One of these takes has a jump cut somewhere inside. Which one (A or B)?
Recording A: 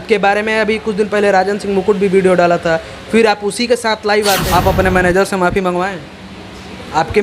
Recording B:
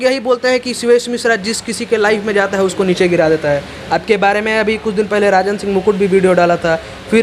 A